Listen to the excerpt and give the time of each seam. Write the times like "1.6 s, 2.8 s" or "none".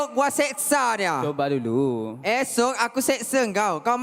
none